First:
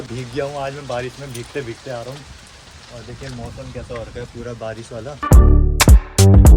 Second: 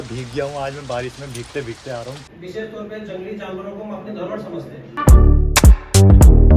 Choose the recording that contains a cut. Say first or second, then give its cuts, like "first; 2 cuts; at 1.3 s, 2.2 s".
second; 2 cuts; at 2.3 s, 4.9 s